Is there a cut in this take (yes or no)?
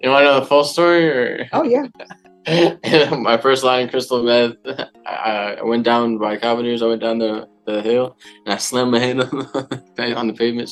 no